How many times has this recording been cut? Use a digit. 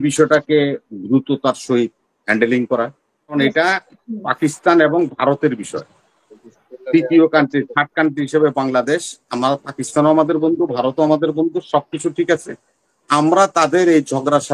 1